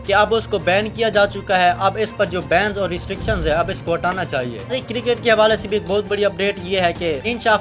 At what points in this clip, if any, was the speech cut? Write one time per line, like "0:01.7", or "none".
0:04.7